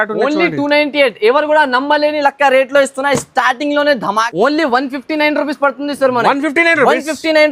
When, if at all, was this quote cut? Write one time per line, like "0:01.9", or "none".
0:04.3